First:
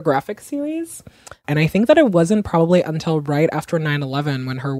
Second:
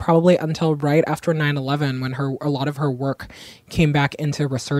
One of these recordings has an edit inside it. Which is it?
first; 1 cut; at 1.1 s

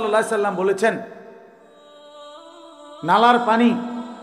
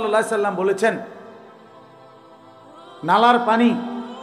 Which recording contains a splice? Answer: second; 2 cuts; at 1.6 s, 3.0 s

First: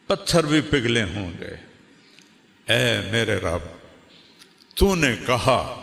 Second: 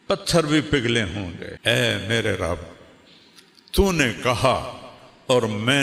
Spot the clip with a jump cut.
second; 1 cut; at 1.5 s

